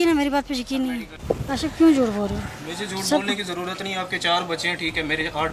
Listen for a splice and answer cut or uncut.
cut